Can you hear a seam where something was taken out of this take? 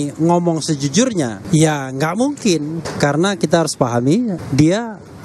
yes; 3 cuts; at 1.4 s, 2.8 s, 4.4 s

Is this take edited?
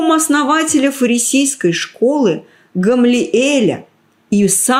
no; 0 cuts

